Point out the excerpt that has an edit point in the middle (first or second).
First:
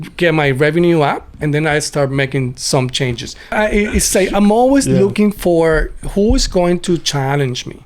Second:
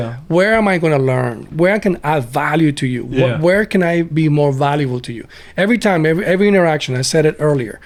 first